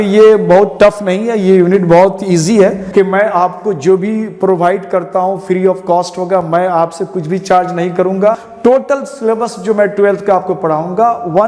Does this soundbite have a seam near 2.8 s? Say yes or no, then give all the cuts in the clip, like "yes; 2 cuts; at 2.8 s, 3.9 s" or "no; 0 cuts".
yes; 2 cuts; at 2.8 s, 8.5 s